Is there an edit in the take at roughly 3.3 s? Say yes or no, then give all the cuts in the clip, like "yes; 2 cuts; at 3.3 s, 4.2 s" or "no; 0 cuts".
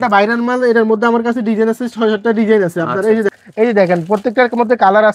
yes; 1 cut; at 3.3 s